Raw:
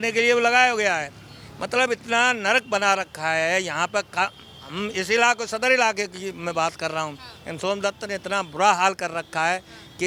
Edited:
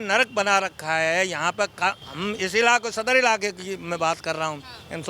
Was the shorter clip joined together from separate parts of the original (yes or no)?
yes